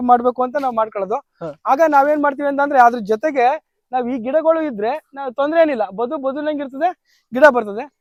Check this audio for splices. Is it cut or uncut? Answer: uncut